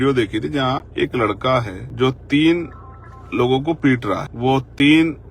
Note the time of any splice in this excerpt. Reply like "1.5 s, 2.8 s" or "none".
1.8 s, 4.3 s